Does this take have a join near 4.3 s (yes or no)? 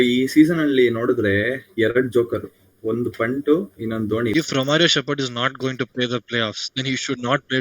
yes